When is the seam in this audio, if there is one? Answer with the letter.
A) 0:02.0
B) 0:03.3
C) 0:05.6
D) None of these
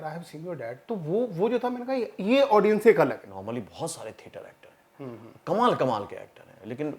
B